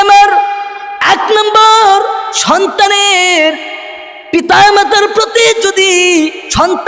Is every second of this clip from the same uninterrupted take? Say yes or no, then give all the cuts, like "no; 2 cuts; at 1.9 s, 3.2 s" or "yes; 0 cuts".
yes; 0 cuts